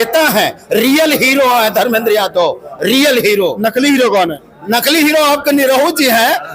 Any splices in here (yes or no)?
no